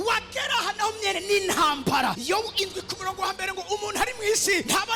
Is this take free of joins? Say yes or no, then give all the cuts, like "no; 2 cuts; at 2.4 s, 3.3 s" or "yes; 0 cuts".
yes; 0 cuts